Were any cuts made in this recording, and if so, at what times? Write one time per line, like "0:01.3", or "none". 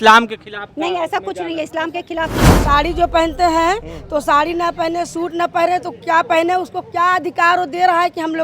0:02.6

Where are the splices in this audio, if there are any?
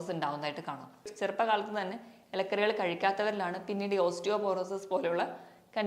0:01.1

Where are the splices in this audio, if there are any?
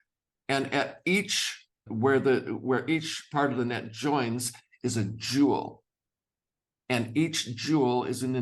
0:01.9

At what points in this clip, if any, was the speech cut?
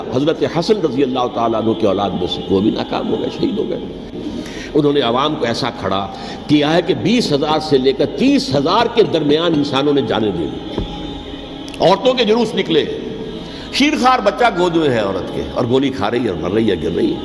0:04.2

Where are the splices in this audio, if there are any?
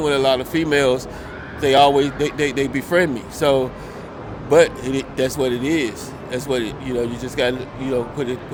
none

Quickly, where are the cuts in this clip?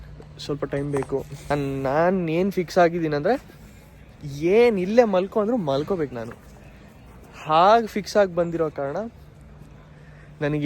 0:01.5

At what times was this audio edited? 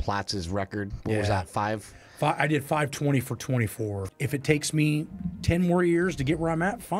0:04.0

